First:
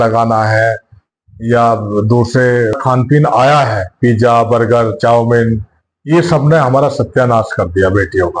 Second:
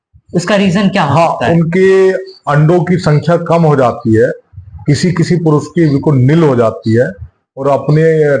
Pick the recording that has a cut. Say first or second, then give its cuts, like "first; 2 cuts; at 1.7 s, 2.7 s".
first; 1 cut; at 2.8 s